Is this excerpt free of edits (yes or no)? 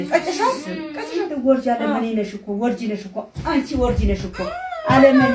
yes